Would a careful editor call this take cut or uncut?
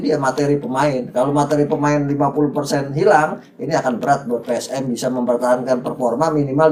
uncut